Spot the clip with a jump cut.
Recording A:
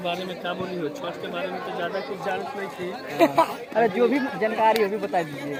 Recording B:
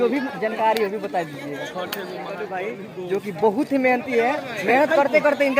B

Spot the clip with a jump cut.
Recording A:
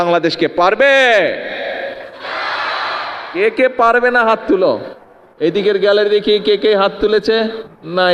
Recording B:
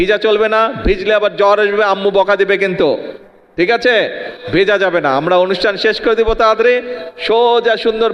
A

